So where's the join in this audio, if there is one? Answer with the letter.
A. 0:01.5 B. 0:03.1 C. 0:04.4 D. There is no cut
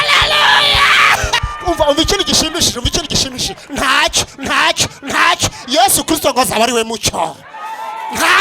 A